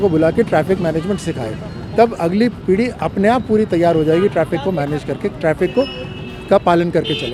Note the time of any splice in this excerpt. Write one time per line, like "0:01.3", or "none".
none